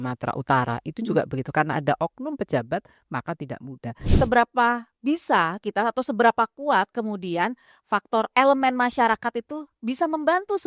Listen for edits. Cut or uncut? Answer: cut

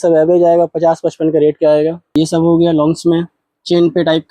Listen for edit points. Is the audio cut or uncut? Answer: cut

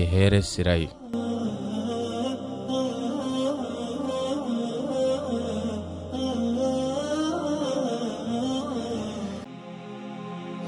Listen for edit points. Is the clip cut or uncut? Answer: cut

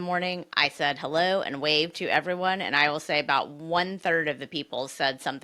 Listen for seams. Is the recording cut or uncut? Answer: uncut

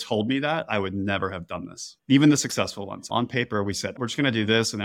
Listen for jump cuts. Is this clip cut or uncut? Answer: cut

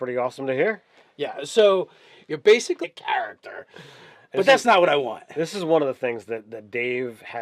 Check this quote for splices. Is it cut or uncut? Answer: uncut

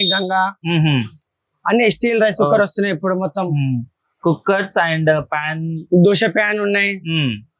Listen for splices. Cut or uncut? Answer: uncut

